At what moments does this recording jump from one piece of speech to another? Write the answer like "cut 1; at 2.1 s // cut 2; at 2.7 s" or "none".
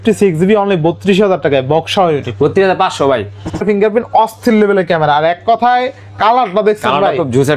cut 1; at 3.6 s